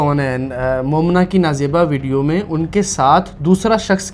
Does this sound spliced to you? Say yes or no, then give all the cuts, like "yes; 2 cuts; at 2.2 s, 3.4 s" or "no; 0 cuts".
no; 0 cuts